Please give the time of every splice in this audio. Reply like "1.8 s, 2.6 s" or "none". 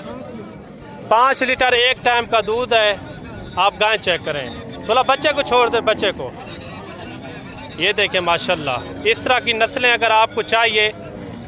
none